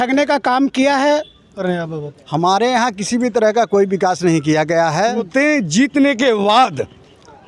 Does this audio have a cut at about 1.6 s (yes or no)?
yes